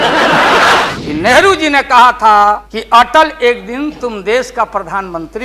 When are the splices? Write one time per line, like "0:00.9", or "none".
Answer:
0:00.9
0:02.7